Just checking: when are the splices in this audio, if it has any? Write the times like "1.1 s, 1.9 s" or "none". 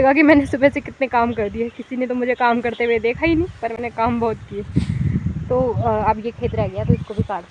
none

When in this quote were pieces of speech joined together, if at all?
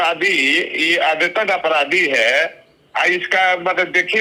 none

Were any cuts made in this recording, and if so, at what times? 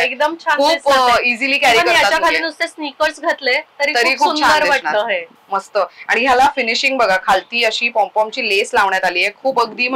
none

